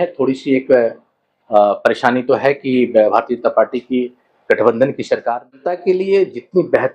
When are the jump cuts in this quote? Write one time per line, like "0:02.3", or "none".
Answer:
0:05.6